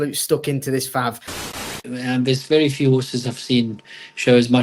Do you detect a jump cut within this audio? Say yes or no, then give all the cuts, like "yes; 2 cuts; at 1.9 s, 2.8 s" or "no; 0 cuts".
yes; 1 cut; at 1.5 s